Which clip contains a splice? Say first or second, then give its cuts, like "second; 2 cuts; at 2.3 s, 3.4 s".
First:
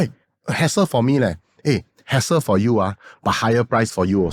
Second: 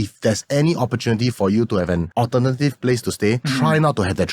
second; 2 cuts; at 2.1 s, 3.5 s